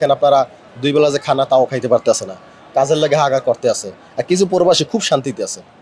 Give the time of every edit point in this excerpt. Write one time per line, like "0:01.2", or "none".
none